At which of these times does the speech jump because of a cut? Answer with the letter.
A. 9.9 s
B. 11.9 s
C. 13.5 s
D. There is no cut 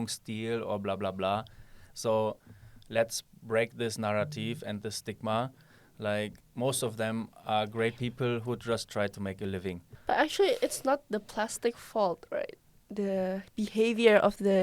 A